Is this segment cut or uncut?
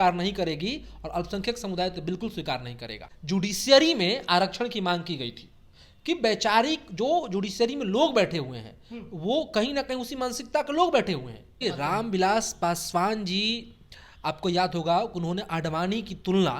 cut